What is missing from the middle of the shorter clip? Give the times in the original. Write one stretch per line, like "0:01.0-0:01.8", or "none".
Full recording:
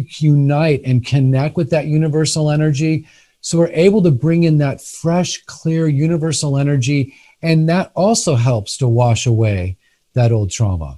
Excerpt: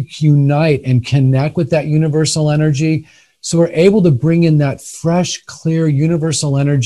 none